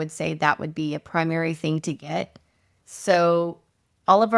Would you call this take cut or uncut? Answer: uncut